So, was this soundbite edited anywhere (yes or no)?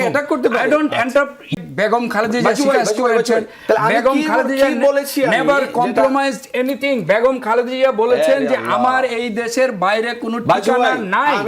yes